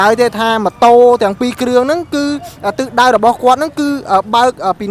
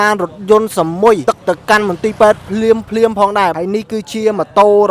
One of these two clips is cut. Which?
second; 2 cuts; at 1.2 s, 3.5 s

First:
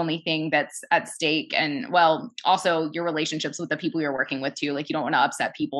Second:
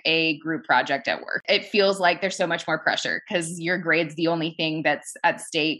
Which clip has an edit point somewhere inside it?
second; 1 cut; at 1.4 s

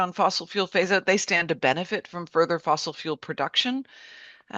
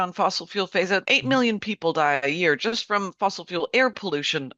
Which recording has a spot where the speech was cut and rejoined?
second; 1 cut; at 1.0 s

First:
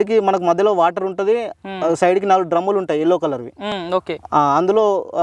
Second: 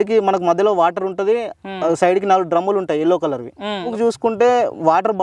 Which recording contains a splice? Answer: second; 1 cut; at 3.8 s

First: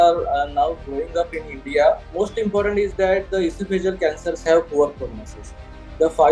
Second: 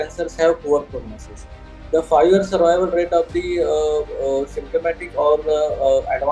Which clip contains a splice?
first; 1 cut; at 2.1 s

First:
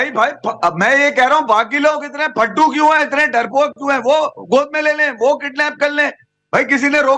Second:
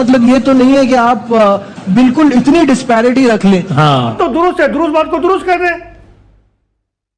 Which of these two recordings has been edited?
second; 1 cut; at 4.1 s

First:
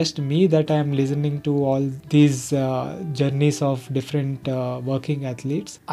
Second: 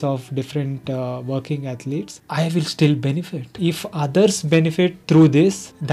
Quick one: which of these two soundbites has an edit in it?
second; 2 cuts; at 3.5 s, 5.0 s

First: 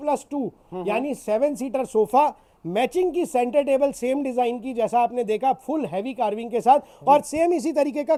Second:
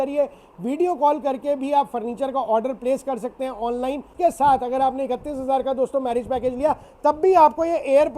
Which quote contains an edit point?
second; 1 cut; at 4.1 s

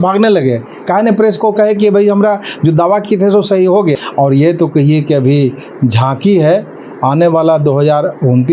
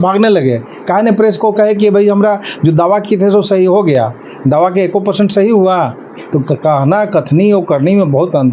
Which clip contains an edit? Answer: first; 1 cut; at 3.9 s

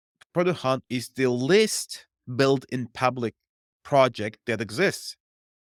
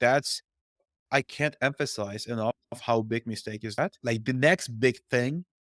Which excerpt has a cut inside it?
second; 1 cut; at 4.0 s

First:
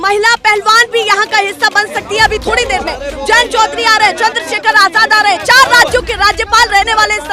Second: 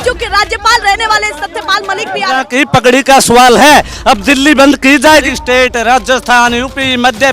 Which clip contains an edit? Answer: second; 2 cuts; at 2.4 s, 5.2 s

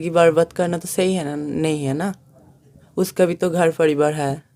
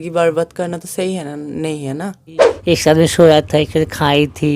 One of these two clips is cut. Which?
second; 1 cut; at 2.5 s

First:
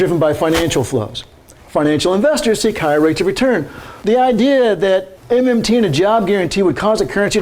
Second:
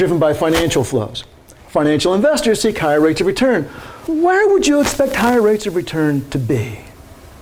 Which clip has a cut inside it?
first; 2 cuts; at 3.9 s, 5.1 s

